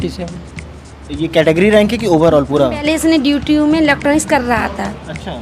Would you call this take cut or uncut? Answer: cut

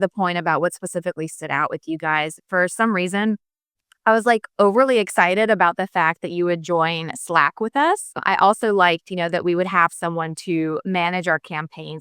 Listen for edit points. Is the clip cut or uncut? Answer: cut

